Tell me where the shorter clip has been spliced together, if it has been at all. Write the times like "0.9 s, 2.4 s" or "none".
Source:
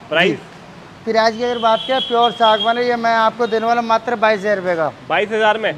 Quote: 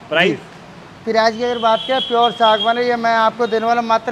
none